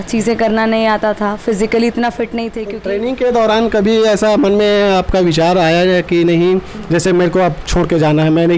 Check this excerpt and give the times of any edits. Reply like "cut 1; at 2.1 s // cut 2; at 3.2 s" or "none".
cut 1; at 2.6 s